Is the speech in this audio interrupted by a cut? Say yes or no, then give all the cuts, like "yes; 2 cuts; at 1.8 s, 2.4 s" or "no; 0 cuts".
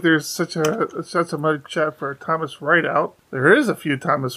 yes; 1 cut; at 3.2 s